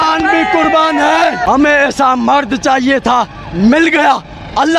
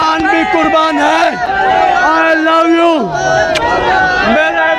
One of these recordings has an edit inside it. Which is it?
first; 1 cut; at 1.4 s

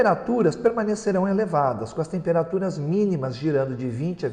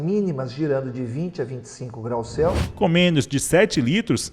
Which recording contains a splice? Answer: second; 1 cut; at 2.6 s

